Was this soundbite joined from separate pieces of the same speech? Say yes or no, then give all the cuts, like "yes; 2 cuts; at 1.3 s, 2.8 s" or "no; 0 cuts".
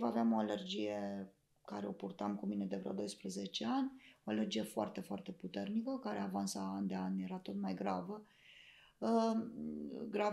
no; 0 cuts